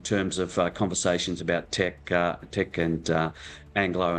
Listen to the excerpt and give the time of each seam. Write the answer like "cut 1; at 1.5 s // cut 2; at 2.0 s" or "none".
none